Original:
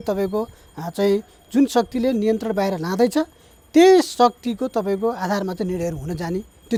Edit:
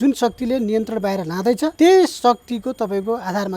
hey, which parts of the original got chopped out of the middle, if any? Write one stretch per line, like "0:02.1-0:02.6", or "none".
0:03.3-0:03.7